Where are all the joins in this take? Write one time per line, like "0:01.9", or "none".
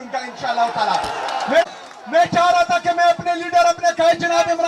none